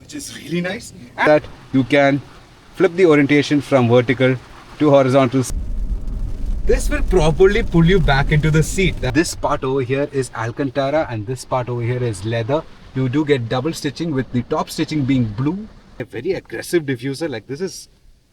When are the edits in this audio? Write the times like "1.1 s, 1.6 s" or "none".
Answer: 1.3 s, 5.5 s, 9.1 s, 15.9 s